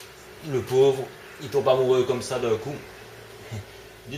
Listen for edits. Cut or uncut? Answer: uncut